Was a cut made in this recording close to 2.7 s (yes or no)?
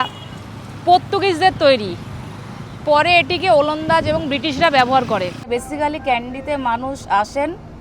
no